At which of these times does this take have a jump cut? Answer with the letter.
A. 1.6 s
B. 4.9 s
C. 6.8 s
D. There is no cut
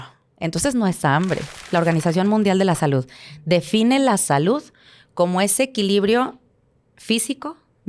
A